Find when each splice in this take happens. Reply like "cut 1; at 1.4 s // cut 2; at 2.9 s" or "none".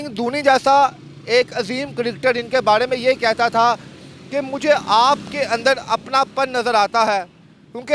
none